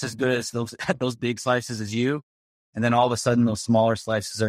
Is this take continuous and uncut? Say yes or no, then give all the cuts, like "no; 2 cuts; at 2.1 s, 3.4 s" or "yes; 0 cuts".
yes; 0 cuts